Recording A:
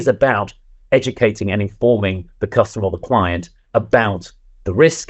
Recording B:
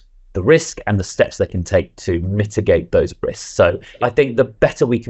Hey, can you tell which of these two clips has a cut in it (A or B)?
B